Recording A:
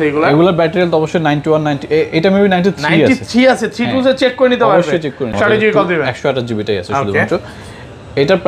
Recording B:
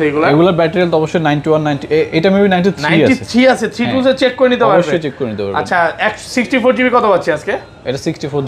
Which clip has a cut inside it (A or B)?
A